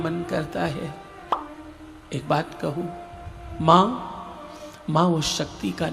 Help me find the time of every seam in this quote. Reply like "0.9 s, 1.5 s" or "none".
none